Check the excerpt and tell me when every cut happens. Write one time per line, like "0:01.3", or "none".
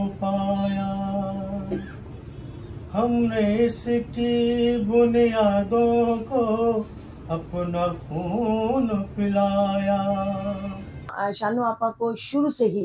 0:11.1